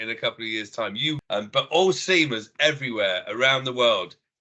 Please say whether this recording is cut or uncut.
cut